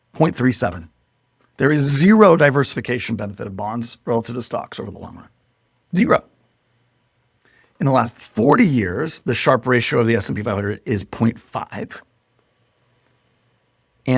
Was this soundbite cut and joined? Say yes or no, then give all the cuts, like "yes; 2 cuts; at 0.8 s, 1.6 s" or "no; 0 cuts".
no; 0 cuts